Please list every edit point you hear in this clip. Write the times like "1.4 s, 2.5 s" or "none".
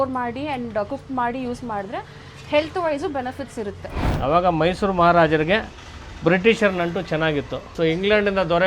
4.1 s, 7.6 s